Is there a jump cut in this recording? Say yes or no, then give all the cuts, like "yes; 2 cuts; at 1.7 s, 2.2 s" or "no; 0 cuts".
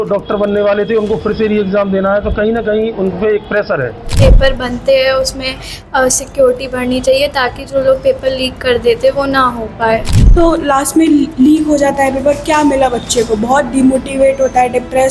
yes; 2 cuts; at 4.2 s, 10.2 s